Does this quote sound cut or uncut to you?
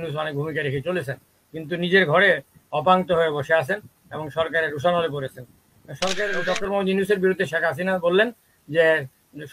cut